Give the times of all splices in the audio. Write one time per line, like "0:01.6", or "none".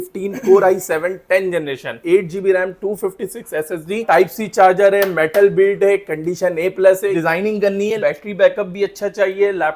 0:02.0
0:07.1